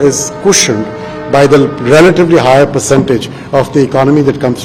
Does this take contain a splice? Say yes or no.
no